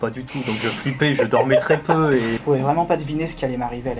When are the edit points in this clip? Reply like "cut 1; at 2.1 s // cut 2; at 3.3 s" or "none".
cut 1; at 2.4 s